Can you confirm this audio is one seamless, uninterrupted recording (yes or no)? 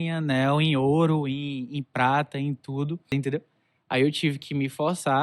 no